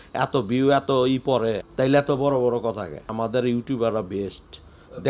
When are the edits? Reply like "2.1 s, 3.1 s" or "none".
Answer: 1.6 s, 3.1 s